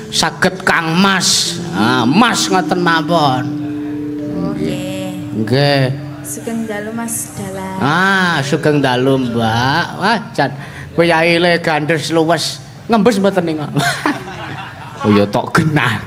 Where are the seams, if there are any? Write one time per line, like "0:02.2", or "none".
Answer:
none

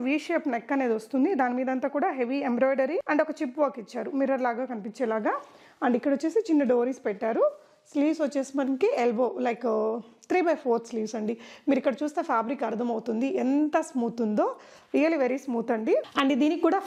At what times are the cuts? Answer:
none

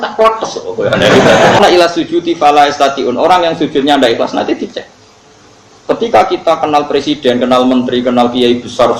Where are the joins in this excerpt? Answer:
0:01.6

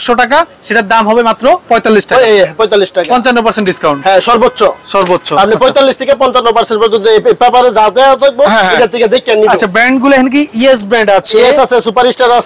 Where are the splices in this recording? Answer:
none

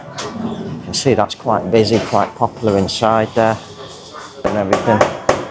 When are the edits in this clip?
0:04.5

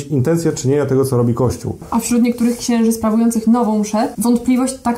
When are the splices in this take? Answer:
0:01.8
0:04.1

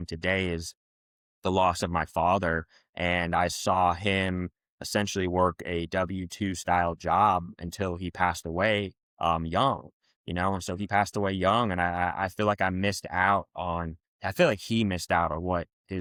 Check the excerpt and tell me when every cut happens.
none

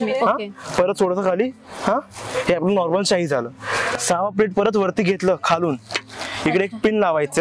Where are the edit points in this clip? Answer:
none

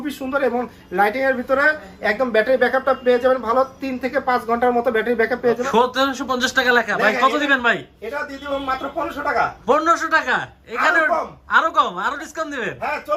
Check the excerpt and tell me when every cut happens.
0:05.6

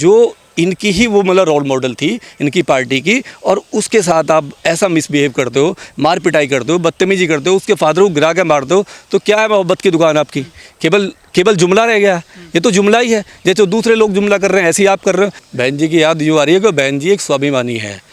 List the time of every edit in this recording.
0:15.4

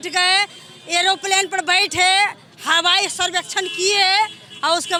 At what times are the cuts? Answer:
none

